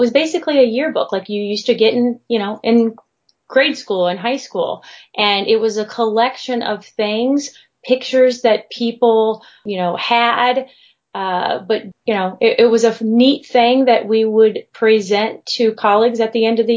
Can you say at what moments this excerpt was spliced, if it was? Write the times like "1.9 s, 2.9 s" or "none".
9.6 s, 11.9 s